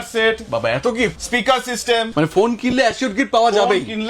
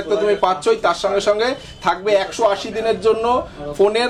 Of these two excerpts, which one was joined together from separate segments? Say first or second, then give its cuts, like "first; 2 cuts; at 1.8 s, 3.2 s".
first; 2 cuts; at 1.2 s, 2.1 s